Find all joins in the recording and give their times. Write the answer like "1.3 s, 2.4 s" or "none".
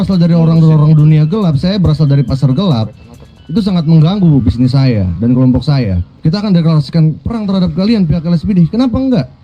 6.1 s